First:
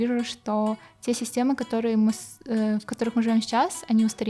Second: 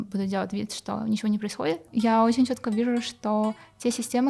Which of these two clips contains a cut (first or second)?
second